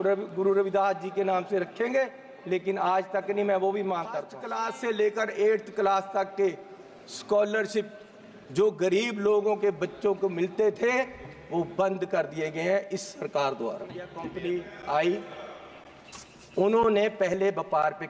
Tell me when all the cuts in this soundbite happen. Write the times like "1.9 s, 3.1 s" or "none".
4.4 s, 14.2 s